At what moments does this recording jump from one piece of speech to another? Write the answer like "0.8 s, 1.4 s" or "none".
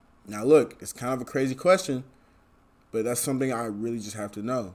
none